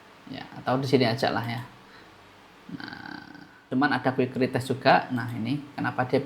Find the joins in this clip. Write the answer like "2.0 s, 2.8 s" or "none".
3.6 s

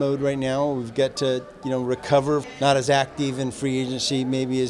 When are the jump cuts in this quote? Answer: 2.5 s

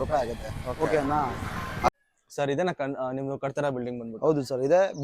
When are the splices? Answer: 1.9 s

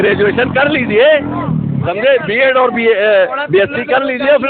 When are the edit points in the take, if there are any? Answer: none

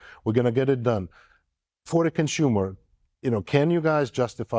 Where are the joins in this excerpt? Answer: none

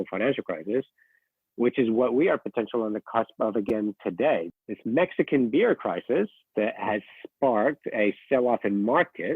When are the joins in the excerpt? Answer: 4.5 s

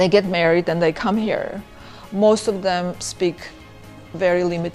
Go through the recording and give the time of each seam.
none

